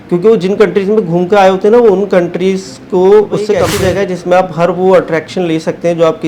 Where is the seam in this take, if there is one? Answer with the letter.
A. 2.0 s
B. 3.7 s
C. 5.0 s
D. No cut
B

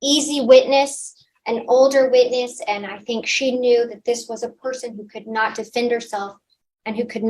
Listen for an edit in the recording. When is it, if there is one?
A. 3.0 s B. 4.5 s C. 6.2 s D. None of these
D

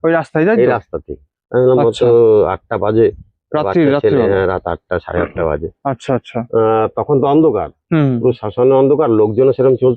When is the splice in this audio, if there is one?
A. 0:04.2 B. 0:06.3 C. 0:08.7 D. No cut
D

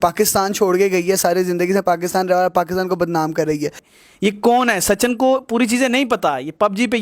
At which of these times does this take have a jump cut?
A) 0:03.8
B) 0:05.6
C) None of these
A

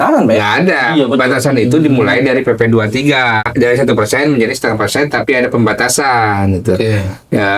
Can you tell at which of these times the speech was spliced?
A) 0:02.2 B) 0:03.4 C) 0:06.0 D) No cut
B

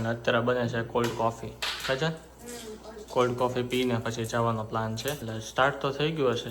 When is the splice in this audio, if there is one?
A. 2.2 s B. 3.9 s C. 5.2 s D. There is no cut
C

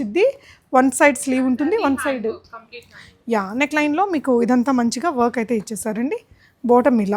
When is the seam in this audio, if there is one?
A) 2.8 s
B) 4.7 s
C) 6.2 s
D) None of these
D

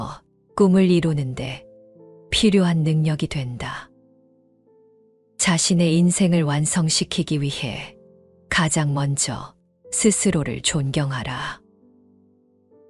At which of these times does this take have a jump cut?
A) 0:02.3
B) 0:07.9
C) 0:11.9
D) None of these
C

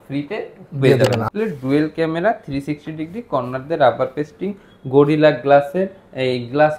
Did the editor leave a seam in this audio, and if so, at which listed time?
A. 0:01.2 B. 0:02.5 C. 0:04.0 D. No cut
A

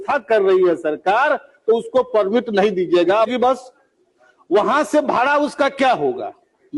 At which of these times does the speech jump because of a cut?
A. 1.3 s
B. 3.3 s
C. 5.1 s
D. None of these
B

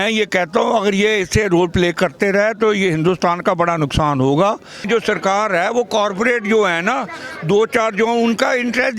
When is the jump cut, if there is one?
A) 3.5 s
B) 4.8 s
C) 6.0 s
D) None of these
B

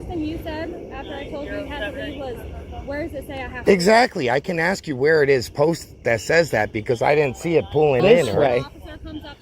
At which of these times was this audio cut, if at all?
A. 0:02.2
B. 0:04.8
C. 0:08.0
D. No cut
C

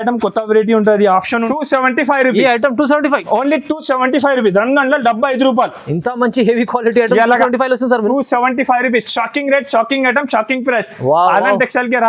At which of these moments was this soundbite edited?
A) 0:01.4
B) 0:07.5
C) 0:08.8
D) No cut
A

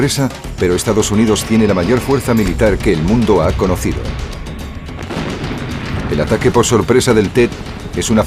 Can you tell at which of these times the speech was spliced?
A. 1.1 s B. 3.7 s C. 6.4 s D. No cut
B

